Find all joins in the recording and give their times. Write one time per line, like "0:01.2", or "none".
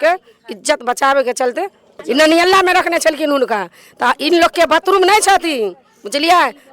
0:01.9